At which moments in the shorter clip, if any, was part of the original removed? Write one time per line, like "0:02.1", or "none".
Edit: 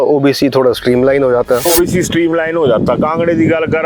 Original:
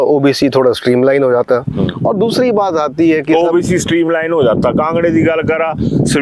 0:01.7